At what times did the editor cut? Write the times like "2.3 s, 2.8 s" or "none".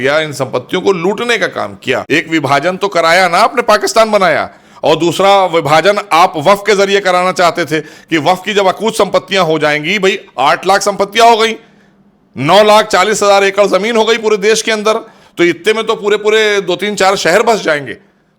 2.0 s